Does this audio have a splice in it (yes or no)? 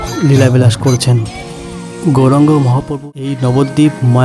yes